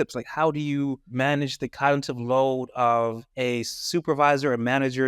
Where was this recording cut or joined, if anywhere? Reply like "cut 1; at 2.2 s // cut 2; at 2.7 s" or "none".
cut 1; at 1.0 s // cut 2; at 3.3 s